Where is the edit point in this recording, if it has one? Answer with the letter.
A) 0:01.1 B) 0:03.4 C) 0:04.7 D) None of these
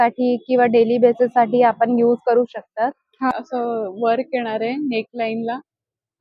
B